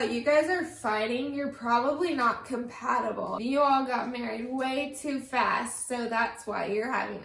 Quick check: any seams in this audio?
yes; 1 cut; at 3.3 s

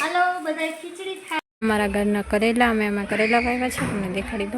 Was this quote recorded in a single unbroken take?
no; 1 cut; at 1.4 s

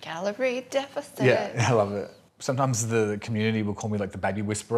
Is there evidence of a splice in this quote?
yes; 1 cut; at 2.1 s

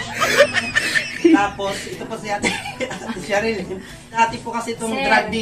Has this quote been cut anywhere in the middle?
yes; 1 cut; at 4.2 s

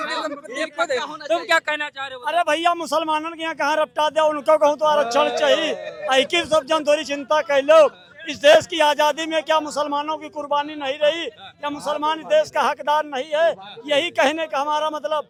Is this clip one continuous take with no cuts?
yes; 0 cuts

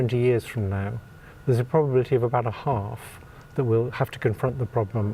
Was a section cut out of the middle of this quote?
no; 0 cuts

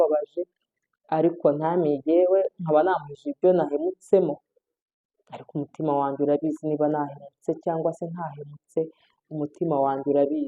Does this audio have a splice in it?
no; 0 cuts

